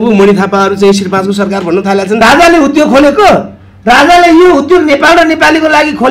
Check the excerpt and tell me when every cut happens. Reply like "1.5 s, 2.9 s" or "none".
2.2 s